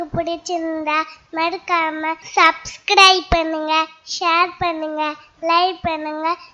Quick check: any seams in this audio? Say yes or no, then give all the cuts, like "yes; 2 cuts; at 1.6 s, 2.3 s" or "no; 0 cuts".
yes; 1 cut; at 2.2 s